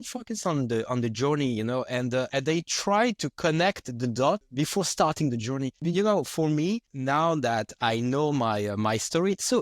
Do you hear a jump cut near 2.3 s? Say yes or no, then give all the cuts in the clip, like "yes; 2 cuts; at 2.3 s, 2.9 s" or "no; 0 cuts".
yes; 4 cuts; at 2.3 s, 4.5 s, 5.8 s, 6.9 s